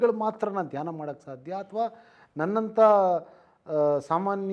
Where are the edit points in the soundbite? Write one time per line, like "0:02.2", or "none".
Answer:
none